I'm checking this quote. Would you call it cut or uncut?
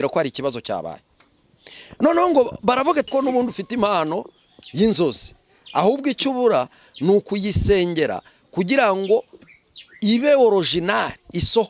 cut